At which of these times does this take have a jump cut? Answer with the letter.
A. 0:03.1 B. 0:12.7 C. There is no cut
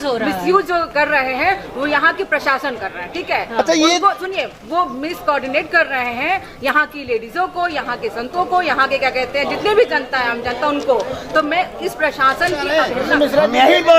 B